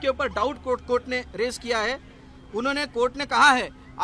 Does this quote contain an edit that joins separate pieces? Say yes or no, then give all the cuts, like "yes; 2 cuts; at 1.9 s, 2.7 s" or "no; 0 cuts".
no; 0 cuts